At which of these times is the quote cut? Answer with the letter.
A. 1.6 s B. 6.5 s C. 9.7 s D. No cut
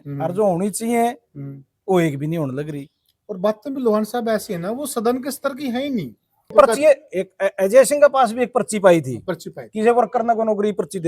B